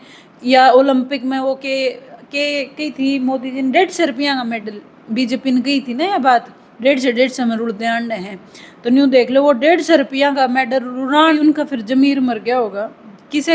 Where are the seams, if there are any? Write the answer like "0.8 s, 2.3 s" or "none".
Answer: 11.4 s